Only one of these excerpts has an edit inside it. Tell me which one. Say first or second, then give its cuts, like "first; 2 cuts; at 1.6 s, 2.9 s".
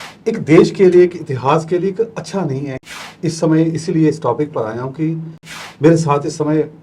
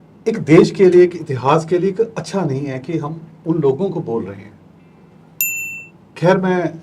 first; 1 cut; at 2.8 s